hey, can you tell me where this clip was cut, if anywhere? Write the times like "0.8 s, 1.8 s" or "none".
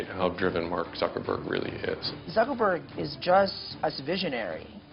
2.1 s, 3.6 s

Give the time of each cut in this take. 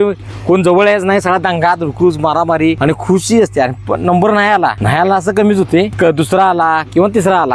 2.8 s, 4.8 s, 5.9 s

